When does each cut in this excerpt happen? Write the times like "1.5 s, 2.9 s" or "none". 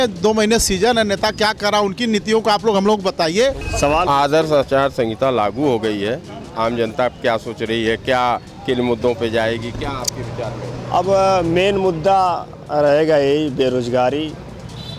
3.6 s